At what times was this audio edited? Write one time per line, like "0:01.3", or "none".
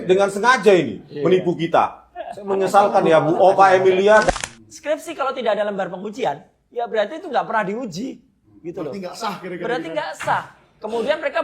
0:04.3